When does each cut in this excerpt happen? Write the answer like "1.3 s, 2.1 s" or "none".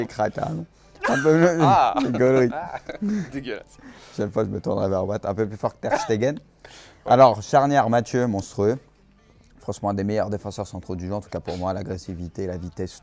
9.1 s